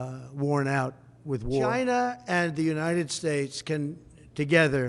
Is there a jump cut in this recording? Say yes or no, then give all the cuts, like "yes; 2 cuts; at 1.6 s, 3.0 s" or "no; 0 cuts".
yes; 1 cut; at 1.7 s